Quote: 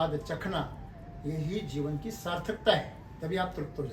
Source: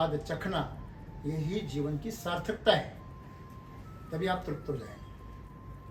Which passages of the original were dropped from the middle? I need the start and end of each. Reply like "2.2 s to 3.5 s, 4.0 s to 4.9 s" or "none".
3.0 s to 3.9 s